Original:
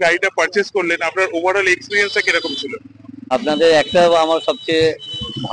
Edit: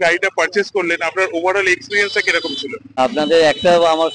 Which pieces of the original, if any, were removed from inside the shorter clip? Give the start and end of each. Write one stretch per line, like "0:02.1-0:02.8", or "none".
0:02.8-0:03.1